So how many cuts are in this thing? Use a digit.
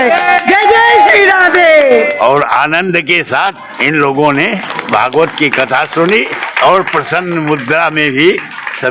4